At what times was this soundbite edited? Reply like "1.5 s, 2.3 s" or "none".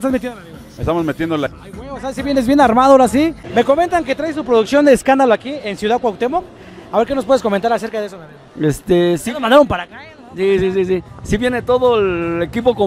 1.5 s, 3.4 s